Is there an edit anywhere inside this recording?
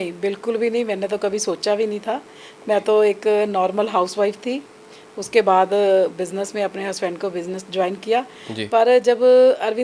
no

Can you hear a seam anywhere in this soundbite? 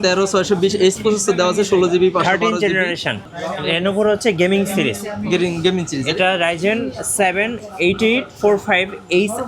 yes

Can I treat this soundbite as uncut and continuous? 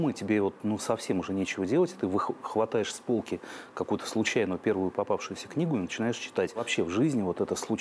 no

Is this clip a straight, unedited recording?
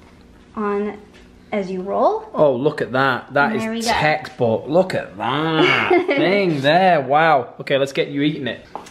yes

